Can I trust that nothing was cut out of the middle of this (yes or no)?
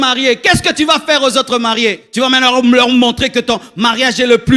no